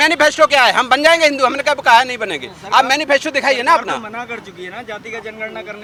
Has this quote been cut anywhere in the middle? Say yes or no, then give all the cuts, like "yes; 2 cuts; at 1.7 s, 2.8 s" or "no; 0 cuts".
no; 0 cuts